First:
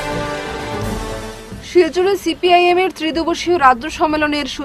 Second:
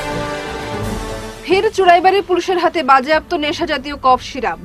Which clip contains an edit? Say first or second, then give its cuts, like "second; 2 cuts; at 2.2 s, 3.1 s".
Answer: second; 1 cut; at 0.9 s